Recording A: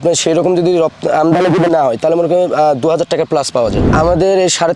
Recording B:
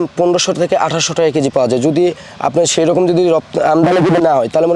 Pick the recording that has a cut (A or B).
A